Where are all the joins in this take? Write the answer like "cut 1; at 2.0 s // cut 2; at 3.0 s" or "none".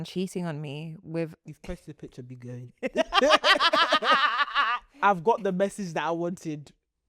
cut 1; at 1.4 s